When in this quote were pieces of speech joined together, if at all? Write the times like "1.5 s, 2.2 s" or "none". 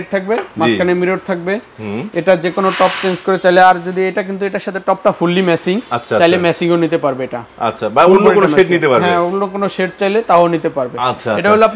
none